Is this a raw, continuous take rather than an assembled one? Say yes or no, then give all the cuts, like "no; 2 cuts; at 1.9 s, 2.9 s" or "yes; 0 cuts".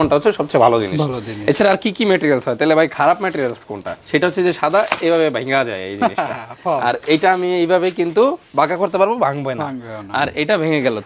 yes; 0 cuts